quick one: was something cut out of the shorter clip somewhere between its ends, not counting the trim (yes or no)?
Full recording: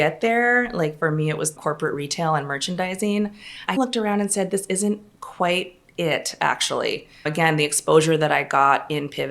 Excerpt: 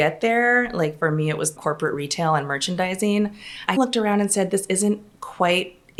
no